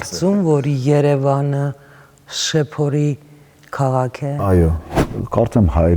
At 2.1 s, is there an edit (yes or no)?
no